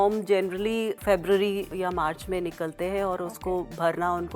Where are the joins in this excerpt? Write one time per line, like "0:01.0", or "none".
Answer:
0:01.0
0:01.7